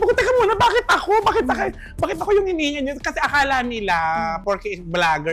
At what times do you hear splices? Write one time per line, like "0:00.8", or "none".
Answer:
none